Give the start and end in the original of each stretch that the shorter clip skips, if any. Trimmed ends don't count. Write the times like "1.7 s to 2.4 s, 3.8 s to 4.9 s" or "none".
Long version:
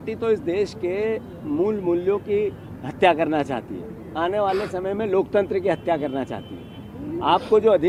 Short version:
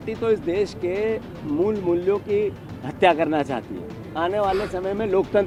none